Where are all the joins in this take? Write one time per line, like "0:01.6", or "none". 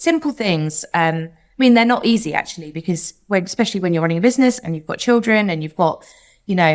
none